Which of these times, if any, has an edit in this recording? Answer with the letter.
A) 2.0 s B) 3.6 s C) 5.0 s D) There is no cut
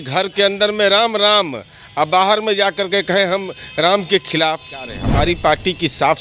C